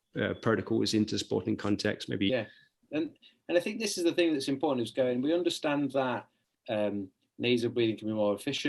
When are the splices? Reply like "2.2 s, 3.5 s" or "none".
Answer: 2.3 s